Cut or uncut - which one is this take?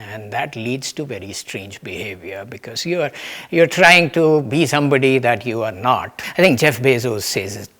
cut